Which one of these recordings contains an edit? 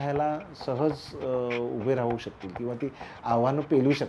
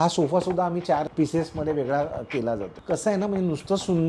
second; 2 cuts; at 1.1 s, 2.7 s

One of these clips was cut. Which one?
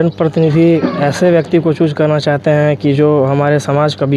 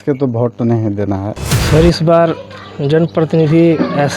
second; 1 cut; at 1.5 s

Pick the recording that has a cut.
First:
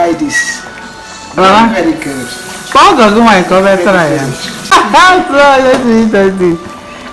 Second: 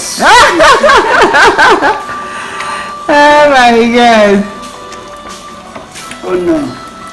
first; 1 cut; at 4.7 s

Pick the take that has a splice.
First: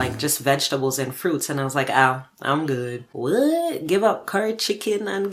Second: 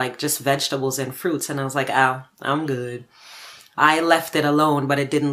first; 1 cut; at 3.0 s

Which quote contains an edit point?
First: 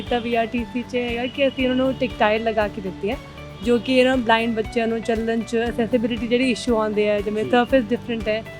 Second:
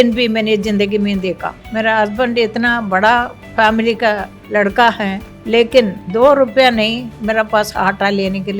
second; 5 cuts; at 1.5 s, 3.4 s, 4.3 s, 5.3 s, 6.0 s

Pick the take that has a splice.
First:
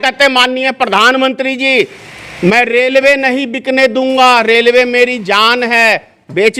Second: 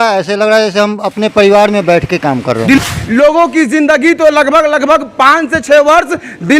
second; 1 cut; at 2.8 s

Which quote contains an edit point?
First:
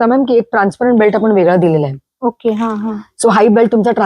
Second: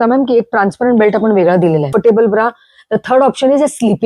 second; 1 cut; at 1.9 s

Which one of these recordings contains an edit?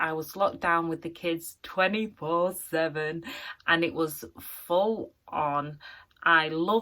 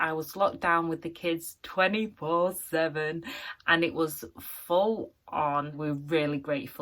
second; 1 cut; at 5.7 s

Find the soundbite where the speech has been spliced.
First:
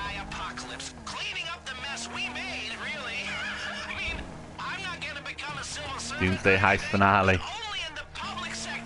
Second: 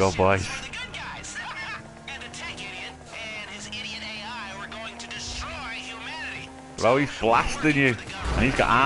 second; 1 cut; at 2.0 s

